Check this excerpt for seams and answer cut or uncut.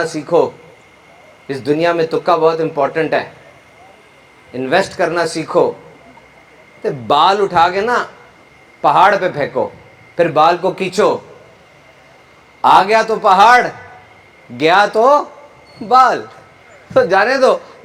uncut